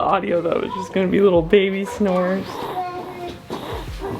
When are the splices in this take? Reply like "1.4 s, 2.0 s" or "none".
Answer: 2.5 s